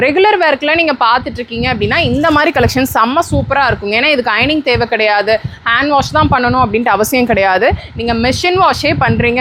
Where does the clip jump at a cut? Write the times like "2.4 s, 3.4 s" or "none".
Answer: none